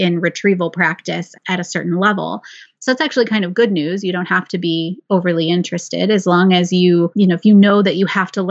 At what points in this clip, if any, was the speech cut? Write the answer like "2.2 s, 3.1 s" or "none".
1.3 s, 7.1 s